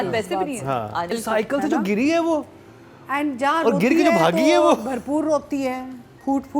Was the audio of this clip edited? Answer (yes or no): yes